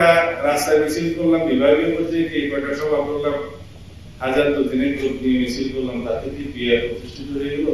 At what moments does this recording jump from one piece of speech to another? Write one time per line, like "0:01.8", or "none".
none